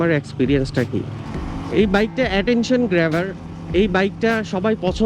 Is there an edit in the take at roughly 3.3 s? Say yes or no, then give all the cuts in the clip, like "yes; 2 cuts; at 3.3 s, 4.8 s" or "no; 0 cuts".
no; 1 cut; at 1.2 s